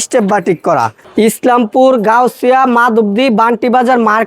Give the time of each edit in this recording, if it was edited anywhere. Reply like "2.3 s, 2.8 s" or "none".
1.0 s